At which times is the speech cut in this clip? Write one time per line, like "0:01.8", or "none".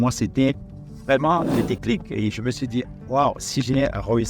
0:01.5